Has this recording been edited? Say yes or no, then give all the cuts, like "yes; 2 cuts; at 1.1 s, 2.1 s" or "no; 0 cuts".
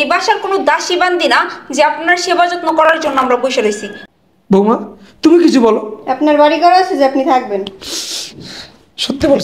yes; 1 cut; at 3.9 s